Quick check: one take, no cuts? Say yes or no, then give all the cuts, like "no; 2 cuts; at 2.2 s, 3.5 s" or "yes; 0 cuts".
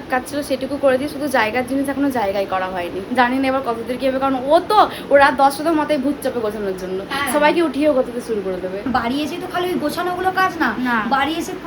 no; 2 cuts; at 3.0 s, 8.9 s